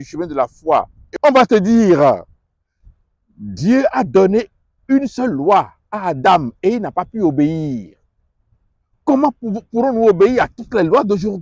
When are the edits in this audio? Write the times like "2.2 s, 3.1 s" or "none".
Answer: 1.0 s